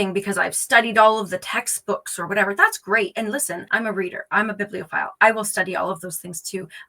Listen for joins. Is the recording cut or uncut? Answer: cut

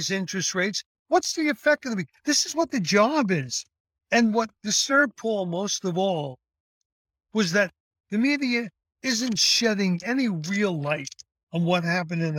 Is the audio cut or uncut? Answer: cut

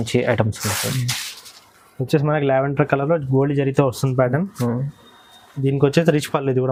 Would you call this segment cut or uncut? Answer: uncut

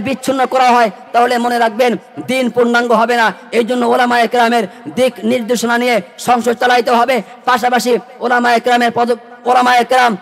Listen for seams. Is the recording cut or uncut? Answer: uncut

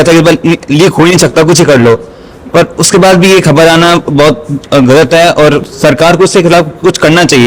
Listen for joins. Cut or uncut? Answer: uncut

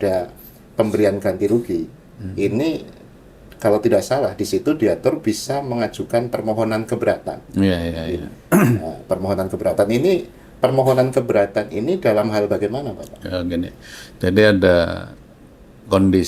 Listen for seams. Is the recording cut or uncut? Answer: uncut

